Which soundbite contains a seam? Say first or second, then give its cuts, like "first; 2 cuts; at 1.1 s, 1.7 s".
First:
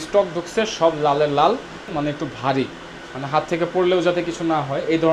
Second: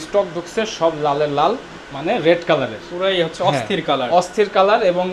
first; 1 cut; at 1.9 s